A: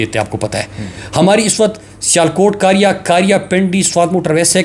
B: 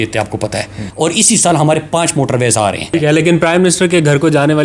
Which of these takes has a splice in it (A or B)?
B